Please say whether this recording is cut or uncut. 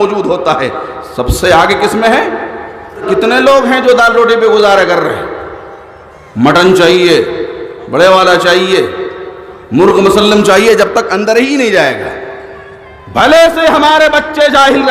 cut